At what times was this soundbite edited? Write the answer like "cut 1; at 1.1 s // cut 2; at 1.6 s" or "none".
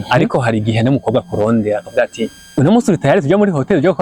cut 1; at 2.4 s